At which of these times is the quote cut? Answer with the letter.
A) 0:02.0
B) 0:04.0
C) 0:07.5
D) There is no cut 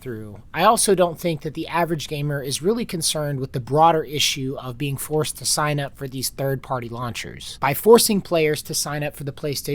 C